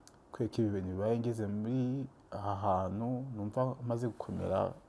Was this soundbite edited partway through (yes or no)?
no